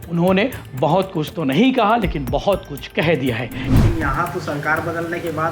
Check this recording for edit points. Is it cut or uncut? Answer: cut